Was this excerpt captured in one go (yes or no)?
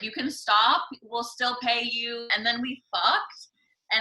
no